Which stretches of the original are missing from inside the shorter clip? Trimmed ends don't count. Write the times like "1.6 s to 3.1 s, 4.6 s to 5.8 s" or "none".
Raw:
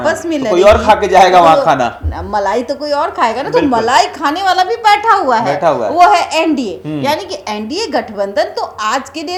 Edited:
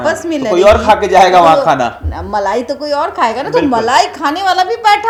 none